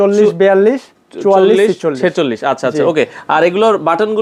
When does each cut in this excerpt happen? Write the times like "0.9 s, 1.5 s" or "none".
none